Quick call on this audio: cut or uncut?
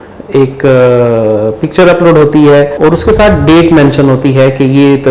cut